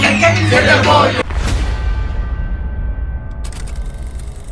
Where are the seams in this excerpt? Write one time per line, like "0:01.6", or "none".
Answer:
0:01.2